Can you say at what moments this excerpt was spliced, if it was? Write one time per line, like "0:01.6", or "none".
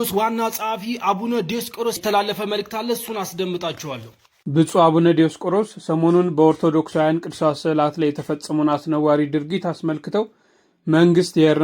0:04.3